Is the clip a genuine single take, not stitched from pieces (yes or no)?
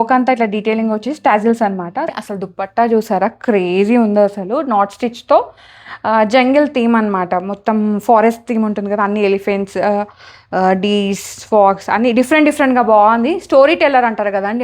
no